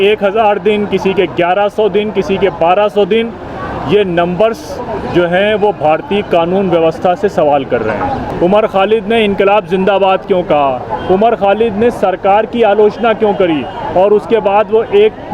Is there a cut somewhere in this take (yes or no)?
yes